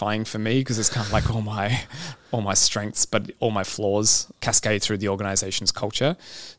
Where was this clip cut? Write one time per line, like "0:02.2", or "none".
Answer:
0:04.3